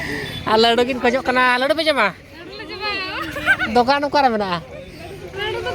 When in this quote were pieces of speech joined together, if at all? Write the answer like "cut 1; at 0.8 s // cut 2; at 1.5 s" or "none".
none